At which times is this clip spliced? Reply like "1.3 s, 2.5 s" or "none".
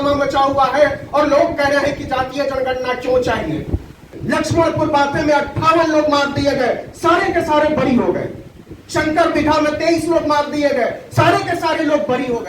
4.2 s

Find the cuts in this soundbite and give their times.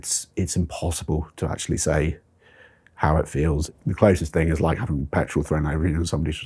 3.6 s

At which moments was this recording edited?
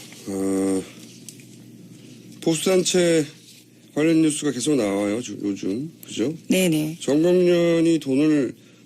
3.1 s

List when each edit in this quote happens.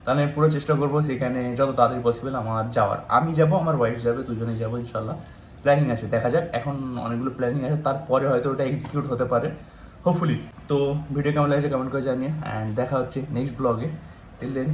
none

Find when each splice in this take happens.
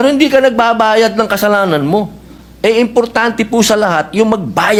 none

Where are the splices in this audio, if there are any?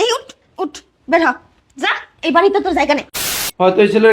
3.1 s

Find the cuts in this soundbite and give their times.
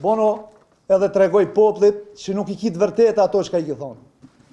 none

